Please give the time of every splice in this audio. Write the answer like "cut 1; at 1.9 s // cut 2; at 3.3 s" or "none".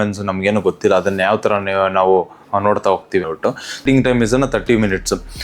cut 1; at 3.8 s